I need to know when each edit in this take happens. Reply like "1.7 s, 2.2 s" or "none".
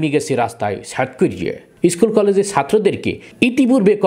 1.7 s